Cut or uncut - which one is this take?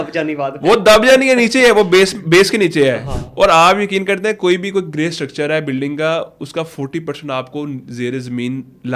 uncut